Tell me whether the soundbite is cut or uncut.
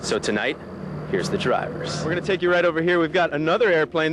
cut